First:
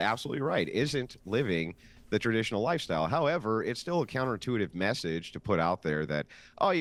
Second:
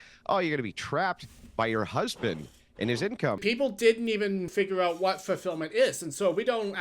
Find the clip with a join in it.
second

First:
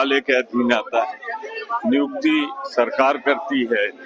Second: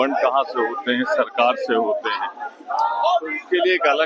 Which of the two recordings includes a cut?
first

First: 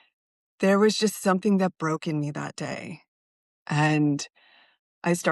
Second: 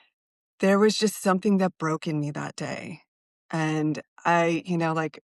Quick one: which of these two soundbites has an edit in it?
first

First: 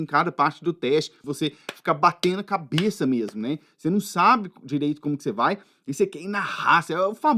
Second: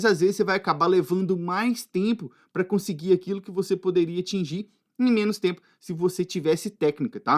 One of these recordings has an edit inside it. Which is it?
first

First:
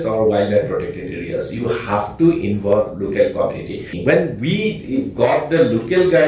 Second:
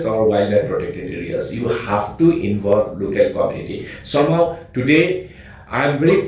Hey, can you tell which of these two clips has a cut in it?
first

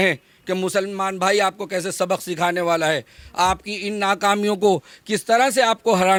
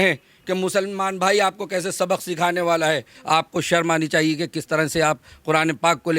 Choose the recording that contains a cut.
second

